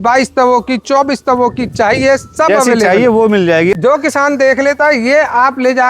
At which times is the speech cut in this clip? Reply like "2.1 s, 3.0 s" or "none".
3.8 s